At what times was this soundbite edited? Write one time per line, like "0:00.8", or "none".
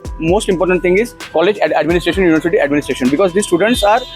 0:01.2